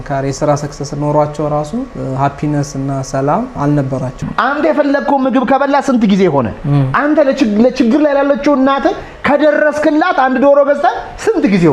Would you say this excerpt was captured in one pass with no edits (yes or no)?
no